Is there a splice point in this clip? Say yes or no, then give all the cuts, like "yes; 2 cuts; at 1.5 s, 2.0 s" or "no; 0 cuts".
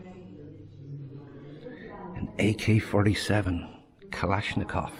no; 0 cuts